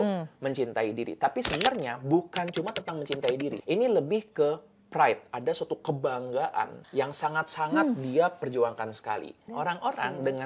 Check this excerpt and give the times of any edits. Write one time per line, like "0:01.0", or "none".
0:03.6
0:06.8
0:09.4